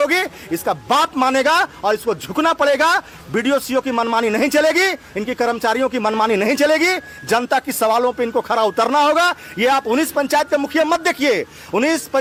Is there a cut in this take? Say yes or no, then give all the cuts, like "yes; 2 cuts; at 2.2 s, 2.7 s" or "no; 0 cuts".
no; 0 cuts